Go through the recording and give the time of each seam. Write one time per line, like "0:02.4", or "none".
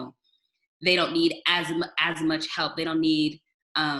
none